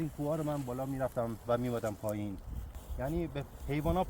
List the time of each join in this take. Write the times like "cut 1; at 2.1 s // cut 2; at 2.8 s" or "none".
cut 1; at 2.8 s